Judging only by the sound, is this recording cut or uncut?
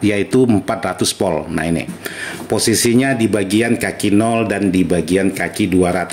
uncut